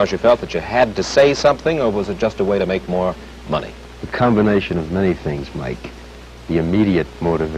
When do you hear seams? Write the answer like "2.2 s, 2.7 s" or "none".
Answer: none